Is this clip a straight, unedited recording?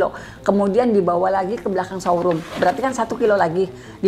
yes; 0 cuts

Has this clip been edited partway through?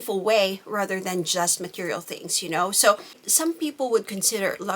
yes; 1 cut; at 3.3 s

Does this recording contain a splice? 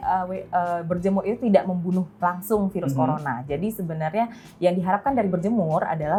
no; 0 cuts

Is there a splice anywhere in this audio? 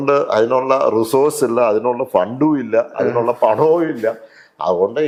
no; 0 cuts

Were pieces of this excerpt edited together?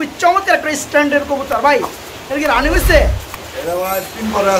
no; 0 cuts

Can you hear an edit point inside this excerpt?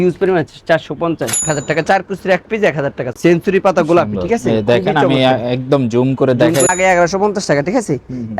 yes; 3 cuts; at 1.4 s, 3.0 s, 6.7 s

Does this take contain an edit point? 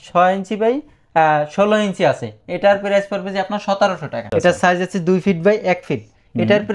yes; 1 cut; at 4.2 s

